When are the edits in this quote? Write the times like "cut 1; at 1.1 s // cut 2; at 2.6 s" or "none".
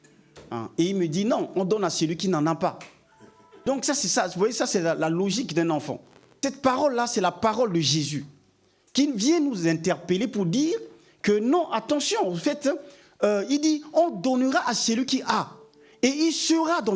cut 1; at 3.6 s // cut 2; at 6.4 s